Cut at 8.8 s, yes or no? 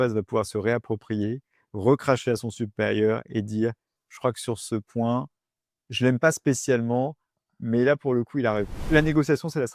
yes